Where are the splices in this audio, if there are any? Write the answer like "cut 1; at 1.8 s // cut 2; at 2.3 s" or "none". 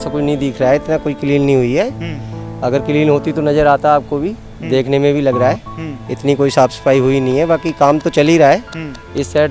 none